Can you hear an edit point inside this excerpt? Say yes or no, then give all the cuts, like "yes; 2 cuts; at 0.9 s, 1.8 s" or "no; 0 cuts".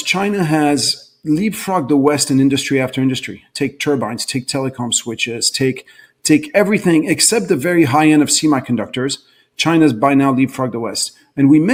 no; 0 cuts